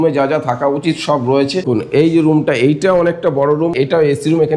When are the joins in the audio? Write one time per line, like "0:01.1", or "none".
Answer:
0:01.7
0:03.7